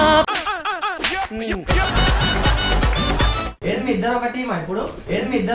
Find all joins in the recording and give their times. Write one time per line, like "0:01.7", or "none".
0:03.4